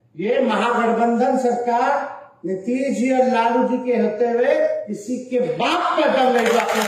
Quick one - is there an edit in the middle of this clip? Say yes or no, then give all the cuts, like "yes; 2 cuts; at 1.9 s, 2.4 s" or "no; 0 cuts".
no; 0 cuts